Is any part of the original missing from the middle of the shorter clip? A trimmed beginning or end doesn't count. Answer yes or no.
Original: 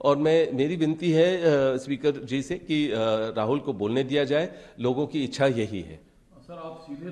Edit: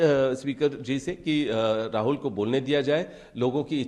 no